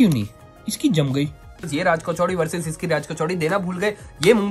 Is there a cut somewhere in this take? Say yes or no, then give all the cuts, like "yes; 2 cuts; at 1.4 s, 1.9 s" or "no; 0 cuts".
yes; 1 cut; at 1.7 s